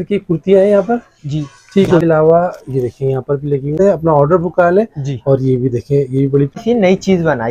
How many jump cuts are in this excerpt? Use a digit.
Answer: 3